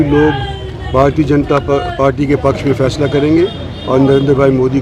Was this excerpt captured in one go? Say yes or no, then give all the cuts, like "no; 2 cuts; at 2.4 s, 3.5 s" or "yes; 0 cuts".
yes; 0 cuts